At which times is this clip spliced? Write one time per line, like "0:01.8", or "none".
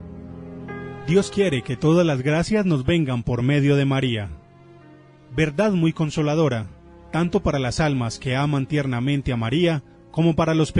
0:01.0

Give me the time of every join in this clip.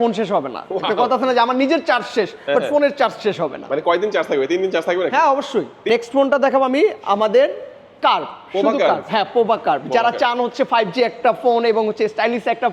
0:05.9

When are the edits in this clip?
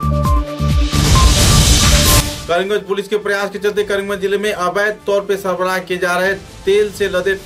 none

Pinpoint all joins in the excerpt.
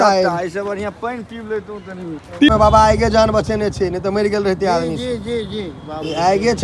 0:02.5

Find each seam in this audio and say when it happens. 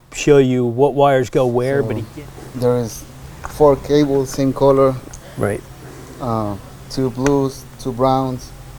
0:02.0

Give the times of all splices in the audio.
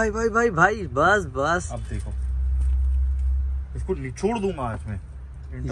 none

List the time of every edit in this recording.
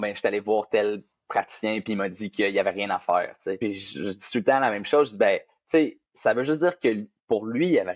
0:03.6

